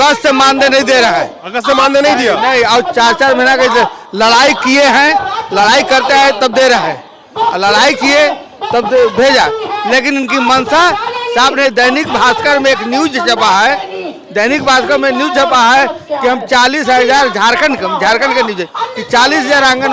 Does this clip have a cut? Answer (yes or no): no